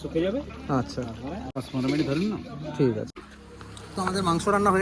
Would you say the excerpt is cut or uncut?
cut